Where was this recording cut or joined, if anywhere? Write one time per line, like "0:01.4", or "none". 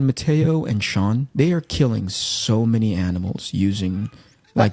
0:01.3